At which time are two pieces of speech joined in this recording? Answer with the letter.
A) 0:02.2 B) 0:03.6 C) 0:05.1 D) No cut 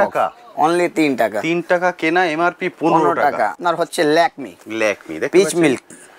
B